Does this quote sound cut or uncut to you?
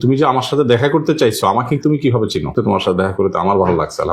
cut